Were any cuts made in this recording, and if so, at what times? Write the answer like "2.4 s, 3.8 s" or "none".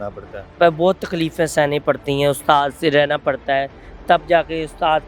none